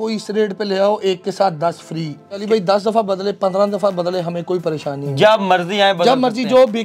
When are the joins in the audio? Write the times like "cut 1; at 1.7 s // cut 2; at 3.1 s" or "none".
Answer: cut 1; at 2.4 s